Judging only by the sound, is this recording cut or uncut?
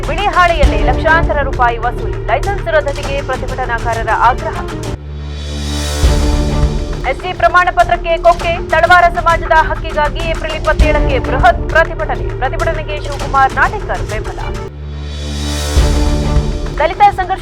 uncut